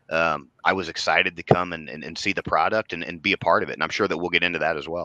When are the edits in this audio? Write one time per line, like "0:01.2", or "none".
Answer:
none

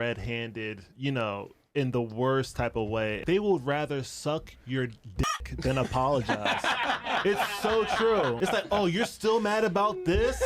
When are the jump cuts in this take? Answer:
0:03.2
0:06.8
0:08.4

